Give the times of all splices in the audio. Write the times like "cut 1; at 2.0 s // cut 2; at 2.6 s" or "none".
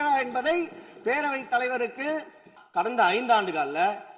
cut 1; at 2.5 s